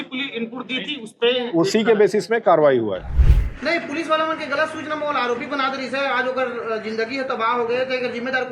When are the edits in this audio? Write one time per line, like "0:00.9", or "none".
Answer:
0:03.1